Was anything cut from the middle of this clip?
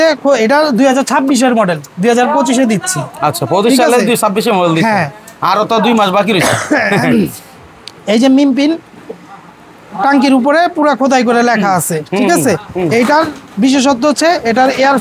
no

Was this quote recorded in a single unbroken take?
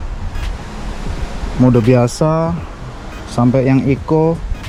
yes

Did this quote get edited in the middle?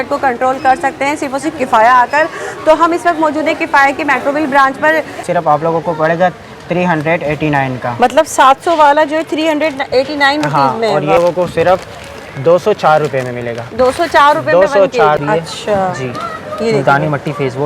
yes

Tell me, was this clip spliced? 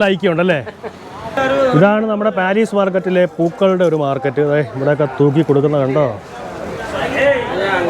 yes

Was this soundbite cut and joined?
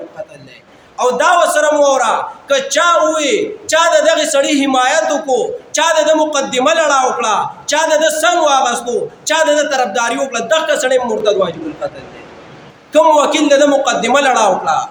no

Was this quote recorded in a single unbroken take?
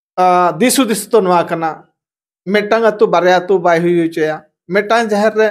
yes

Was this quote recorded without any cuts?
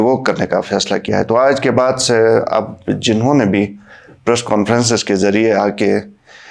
yes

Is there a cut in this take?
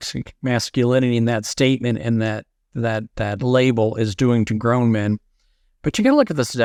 no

